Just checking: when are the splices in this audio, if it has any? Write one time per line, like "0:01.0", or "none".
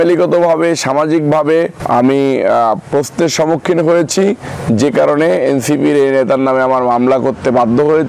0:01.8